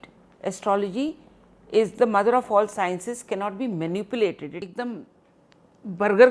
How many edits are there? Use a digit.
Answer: 1